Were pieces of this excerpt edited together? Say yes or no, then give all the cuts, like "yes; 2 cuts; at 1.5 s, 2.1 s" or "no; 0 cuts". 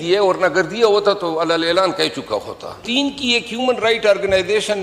yes; 1 cut; at 2.8 s